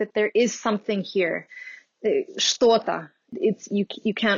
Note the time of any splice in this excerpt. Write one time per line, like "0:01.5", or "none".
0:03.3